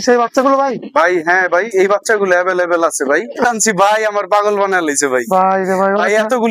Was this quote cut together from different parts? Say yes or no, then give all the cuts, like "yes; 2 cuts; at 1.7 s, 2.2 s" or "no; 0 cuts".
yes; 1 cut; at 3.5 s